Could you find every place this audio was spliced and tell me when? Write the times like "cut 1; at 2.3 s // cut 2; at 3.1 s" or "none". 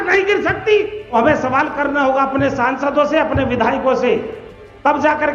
cut 1; at 1.1 s